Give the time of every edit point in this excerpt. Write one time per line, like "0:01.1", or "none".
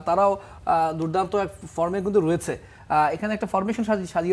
none